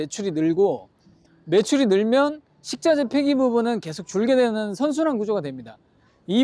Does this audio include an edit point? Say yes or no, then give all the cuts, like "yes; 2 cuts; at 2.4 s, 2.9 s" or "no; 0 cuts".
no; 0 cuts